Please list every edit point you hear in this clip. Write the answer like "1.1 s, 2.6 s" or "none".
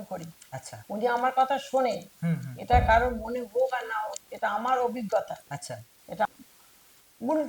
6.3 s